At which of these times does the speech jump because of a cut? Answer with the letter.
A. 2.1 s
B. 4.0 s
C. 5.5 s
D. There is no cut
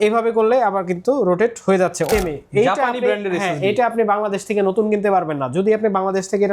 A